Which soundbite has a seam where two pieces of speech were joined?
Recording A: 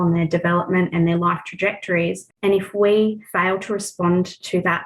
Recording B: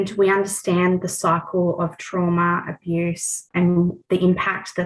A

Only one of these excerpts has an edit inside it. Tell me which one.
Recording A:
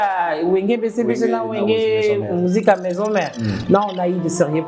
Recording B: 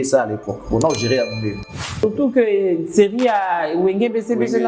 B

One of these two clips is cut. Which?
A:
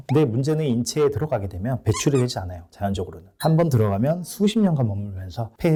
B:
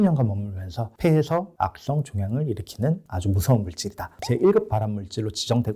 B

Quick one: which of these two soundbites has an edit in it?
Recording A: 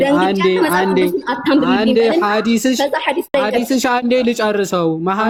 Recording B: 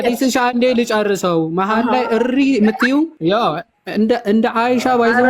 B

